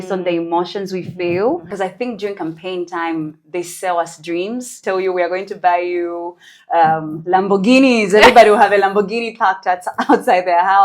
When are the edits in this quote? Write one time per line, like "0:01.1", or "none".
0:01.7
0:04.8